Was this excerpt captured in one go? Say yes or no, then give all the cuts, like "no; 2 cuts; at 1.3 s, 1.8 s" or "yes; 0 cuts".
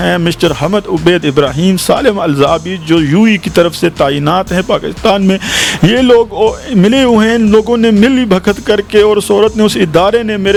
yes; 0 cuts